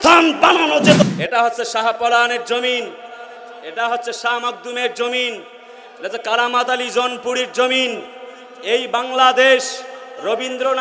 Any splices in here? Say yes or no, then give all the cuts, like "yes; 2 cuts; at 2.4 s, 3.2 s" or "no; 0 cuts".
yes; 1 cut; at 1.0 s